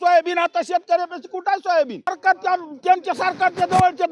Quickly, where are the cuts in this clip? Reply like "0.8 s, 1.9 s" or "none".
2.1 s